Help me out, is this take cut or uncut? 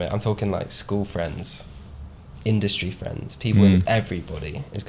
uncut